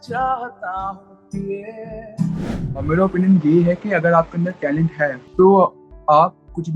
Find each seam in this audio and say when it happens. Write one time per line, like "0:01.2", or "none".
0:02.6
0:05.2